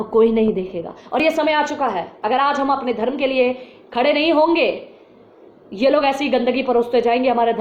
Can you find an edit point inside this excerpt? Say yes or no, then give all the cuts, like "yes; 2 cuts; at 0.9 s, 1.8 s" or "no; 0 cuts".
no; 0 cuts